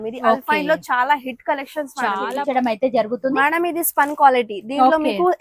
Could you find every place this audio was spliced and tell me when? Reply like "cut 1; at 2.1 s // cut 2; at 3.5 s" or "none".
cut 1; at 2.2 s